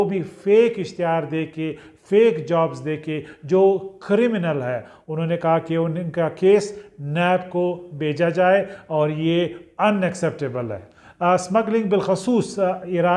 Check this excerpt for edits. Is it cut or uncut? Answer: uncut